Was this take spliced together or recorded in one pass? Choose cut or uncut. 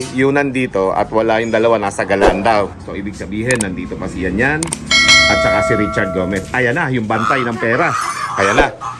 uncut